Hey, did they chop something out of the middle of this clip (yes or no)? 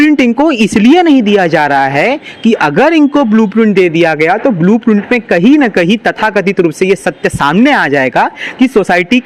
no